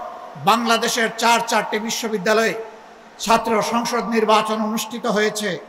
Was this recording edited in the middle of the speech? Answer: no; 0 cuts

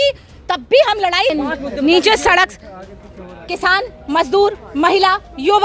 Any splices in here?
yes; 1 cut; at 1.3 s

